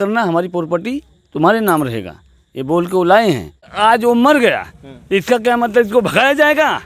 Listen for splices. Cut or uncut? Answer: cut